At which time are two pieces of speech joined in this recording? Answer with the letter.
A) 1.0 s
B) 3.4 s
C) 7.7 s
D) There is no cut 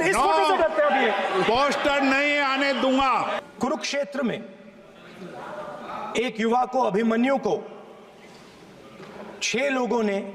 B